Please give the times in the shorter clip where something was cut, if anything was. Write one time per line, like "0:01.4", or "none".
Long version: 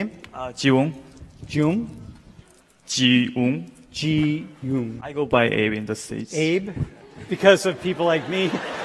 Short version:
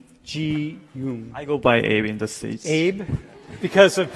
none